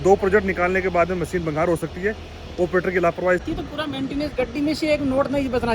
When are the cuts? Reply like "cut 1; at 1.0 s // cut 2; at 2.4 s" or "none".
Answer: cut 1; at 3.4 s

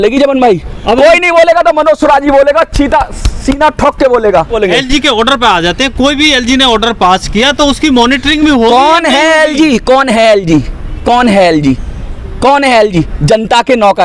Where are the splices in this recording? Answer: cut 1; at 4.5 s

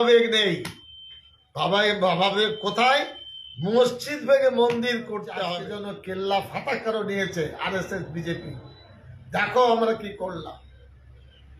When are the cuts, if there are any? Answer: cut 1; at 5.7 s

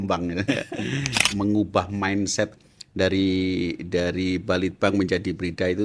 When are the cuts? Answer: cut 1; at 1.2 s

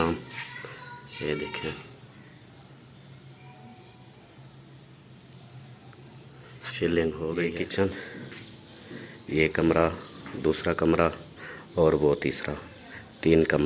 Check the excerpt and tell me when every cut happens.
cut 1; at 7.5 s

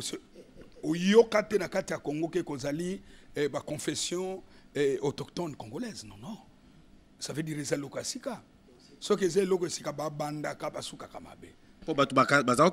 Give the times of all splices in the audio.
cut 1; at 11.7 s

